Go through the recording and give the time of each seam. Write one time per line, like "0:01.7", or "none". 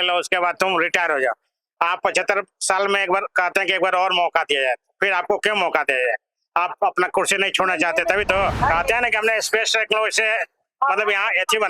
0:08.6